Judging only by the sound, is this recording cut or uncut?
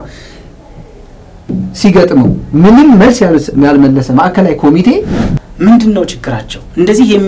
cut